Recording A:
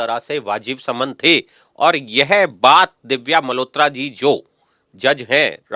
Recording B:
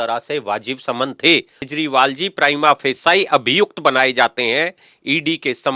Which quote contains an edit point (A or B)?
B